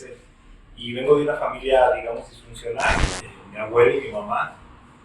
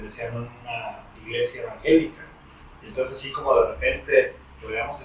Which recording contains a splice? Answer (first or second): first